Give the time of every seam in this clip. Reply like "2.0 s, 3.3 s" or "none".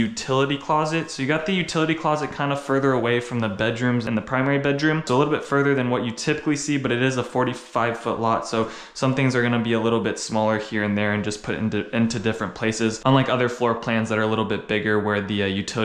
none